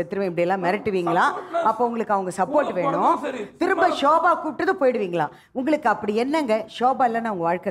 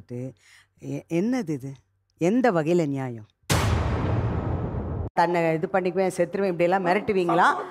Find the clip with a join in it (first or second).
second